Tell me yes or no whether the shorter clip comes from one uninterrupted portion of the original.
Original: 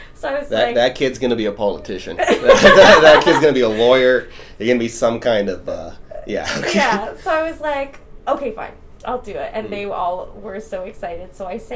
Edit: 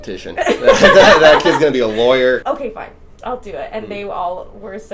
no